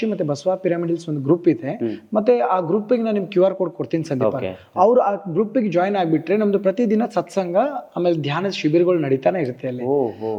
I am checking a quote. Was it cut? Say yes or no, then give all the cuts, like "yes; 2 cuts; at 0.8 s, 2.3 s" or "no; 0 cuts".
no; 0 cuts